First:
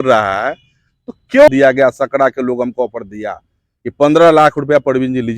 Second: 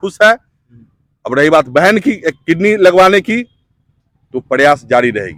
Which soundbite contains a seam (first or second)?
first